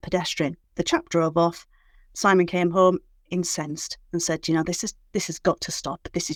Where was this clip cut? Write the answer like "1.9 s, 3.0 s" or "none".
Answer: none